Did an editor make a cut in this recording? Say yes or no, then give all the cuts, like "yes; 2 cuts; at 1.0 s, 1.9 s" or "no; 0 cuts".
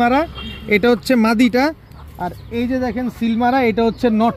no; 0 cuts